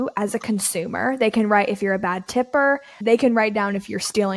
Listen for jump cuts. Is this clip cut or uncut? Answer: cut